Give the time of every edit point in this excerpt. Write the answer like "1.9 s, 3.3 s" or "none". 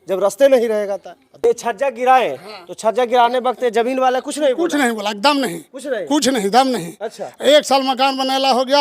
1.2 s